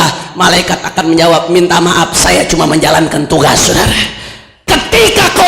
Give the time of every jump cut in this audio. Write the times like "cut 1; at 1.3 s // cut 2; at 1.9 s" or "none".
cut 1; at 4.5 s